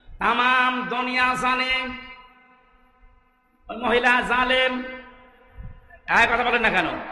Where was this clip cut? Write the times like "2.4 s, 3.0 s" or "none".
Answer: none